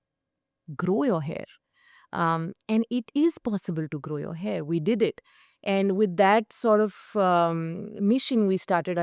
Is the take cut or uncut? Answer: uncut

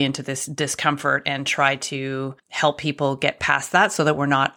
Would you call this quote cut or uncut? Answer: cut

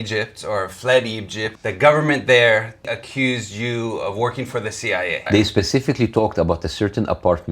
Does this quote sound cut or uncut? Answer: cut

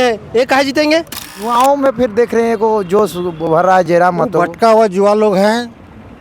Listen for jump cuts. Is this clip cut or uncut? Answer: cut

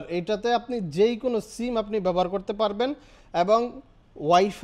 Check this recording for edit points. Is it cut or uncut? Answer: uncut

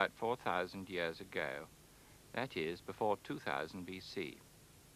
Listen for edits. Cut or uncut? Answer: uncut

